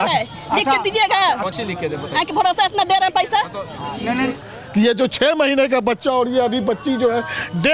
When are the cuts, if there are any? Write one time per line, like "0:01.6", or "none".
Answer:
0:04.3

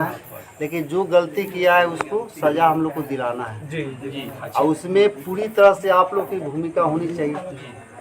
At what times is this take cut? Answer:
none

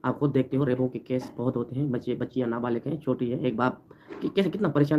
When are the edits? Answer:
none

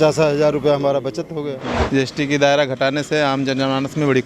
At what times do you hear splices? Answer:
0:01.7

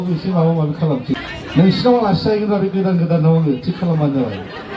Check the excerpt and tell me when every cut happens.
0:01.2

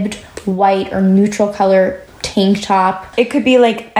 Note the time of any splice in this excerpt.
0:02.1
0:03.1

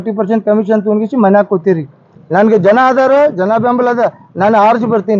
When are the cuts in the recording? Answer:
0:02.1

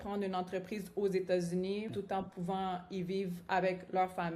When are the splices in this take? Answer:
0:01.9

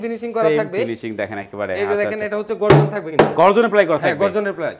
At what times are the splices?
none

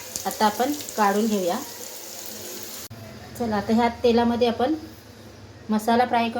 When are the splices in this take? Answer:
0:02.9

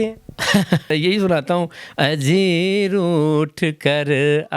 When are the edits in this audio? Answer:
0:00.9

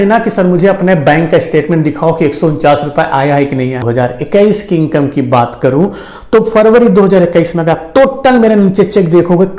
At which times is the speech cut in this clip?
0:03.8

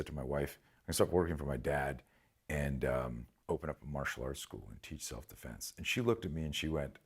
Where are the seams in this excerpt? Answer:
0:03.3

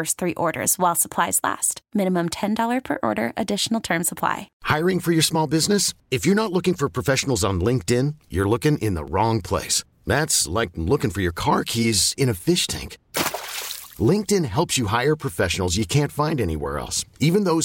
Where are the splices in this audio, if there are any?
0:04.5

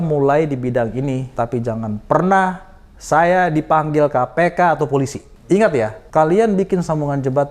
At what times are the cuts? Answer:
0:01.3
0:05.3
0:06.0

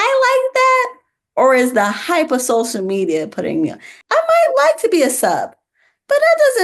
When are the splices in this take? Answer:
0:04.0

